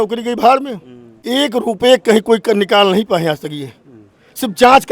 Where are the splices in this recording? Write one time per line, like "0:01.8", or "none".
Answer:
0:01.1